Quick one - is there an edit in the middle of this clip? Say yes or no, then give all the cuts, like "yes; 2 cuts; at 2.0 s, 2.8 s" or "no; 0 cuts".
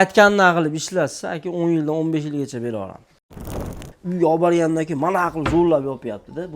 yes; 1 cut; at 3.5 s